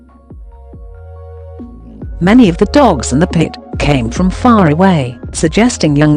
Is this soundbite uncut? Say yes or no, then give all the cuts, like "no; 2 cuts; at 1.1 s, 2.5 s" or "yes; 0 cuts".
no; 1 cut; at 2.1 s